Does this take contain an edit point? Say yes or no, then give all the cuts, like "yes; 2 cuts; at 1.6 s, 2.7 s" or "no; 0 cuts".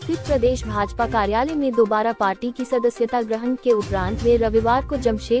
no; 0 cuts